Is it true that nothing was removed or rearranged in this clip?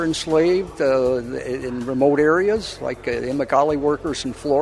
yes; 0 cuts

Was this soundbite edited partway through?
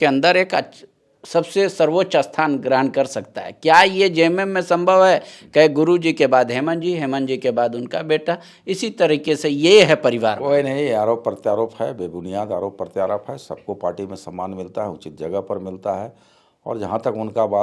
no; 0 cuts

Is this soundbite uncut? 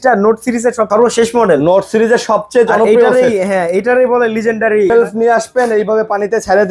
no; 2 cuts; at 0.9 s, 4.9 s

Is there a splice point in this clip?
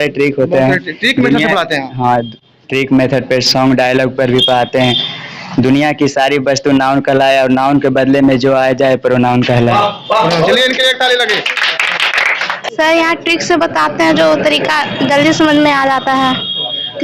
yes; 1 cut; at 12.6 s

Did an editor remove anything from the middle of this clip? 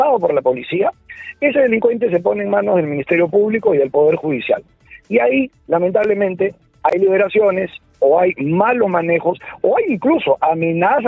no; 0 cuts

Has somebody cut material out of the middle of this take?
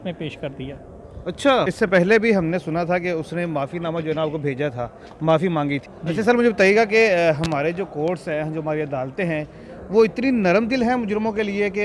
yes; 2 cuts; at 1.7 s, 5.9 s

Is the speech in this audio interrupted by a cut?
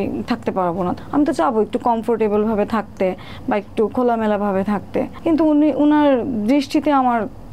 yes; 2 cuts; at 0.9 s, 5.1 s

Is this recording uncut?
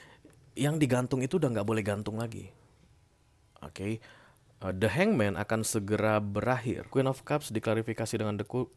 no; 1 cut; at 6.8 s

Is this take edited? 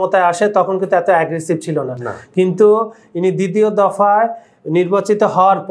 no; 0 cuts

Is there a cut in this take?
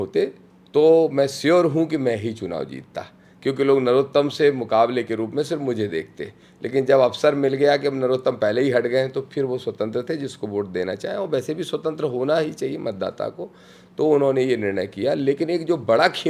no; 0 cuts

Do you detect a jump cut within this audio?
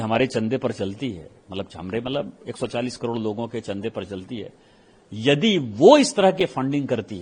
no; 0 cuts

